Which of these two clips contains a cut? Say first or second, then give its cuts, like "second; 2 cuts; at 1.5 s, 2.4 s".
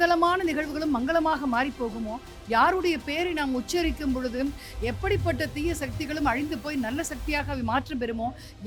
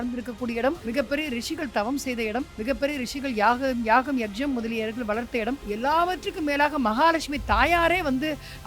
second; 3 cuts; at 0.8 s, 2.5 s, 5.6 s